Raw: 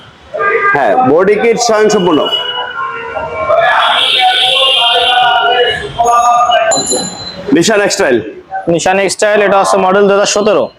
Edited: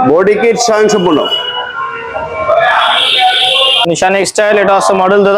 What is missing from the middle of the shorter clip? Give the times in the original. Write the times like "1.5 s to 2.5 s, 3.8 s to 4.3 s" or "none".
4.8 s to 8.6 s